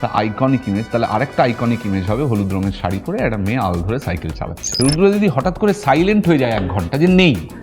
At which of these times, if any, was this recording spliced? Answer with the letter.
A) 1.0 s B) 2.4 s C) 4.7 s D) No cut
C